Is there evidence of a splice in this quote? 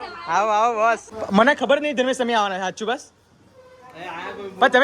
yes; 1 cut; at 1.1 s

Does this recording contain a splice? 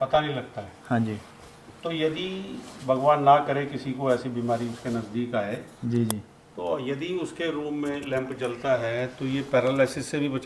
no; 0 cuts

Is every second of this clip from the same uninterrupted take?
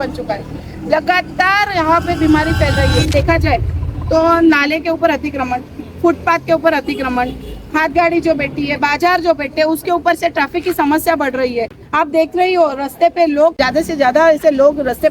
no; 2 cuts; at 3.1 s, 13.5 s

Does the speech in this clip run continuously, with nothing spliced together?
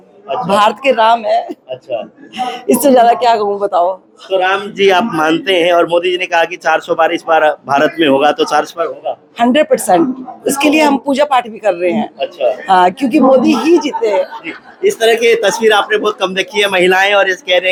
yes; 0 cuts

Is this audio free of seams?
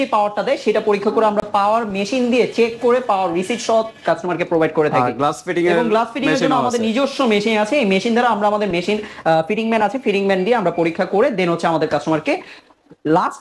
yes; 0 cuts

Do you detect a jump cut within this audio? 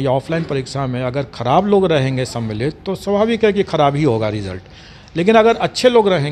no; 0 cuts

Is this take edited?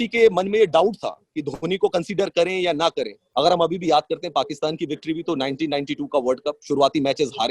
yes; 1 cut; at 3.2 s

